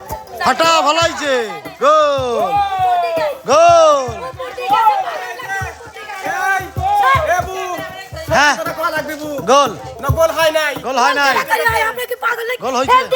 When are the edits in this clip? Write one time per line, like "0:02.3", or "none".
none